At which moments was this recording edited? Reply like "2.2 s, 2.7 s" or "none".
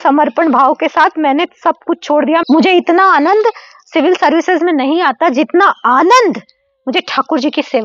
2.4 s